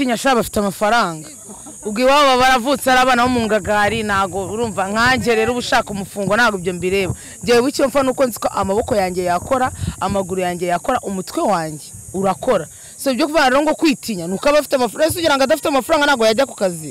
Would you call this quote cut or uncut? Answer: uncut